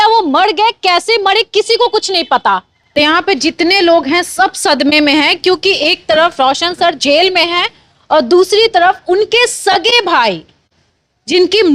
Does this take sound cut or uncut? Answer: cut